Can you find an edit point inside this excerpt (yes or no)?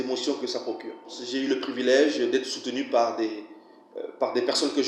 yes